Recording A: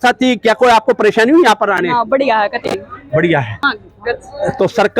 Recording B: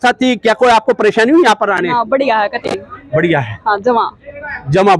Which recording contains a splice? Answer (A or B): A